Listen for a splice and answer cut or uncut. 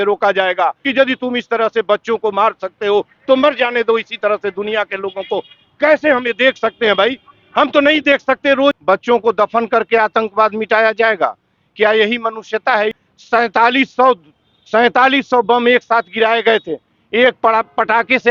cut